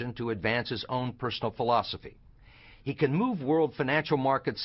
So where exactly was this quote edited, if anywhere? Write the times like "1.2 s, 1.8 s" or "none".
1.1 s